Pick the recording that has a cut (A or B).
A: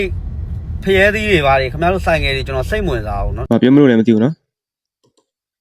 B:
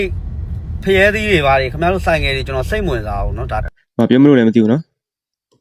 A